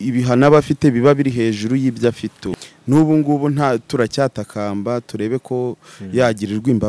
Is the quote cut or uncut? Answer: cut